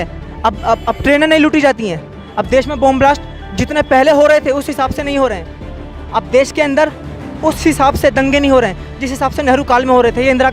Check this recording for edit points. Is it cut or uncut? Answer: uncut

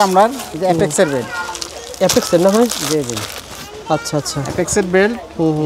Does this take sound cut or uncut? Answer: uncut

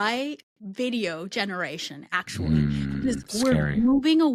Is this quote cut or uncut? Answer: uncut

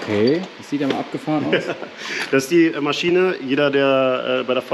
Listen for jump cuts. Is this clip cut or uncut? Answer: uncut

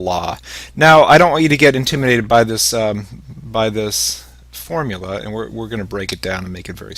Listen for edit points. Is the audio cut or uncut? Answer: uncut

